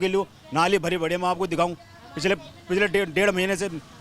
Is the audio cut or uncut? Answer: uncut